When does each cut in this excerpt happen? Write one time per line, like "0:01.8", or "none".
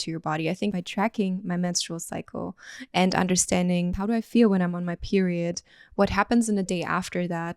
0:00.7
0:04.0